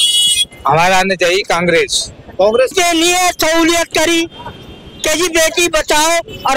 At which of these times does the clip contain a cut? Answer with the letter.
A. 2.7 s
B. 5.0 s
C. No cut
A